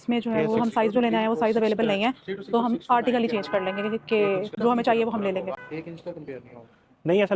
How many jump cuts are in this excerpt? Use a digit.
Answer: 0